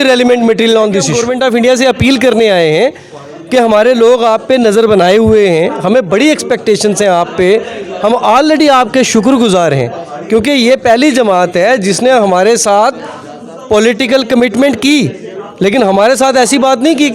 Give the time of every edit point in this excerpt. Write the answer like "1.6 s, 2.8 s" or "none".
1.2 s